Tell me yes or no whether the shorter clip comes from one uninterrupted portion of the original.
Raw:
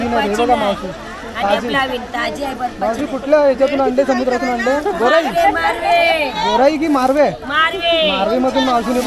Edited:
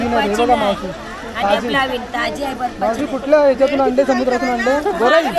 yes